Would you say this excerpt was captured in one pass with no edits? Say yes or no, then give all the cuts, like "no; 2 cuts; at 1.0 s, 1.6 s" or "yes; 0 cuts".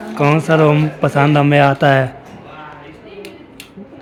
yes; 0 cuts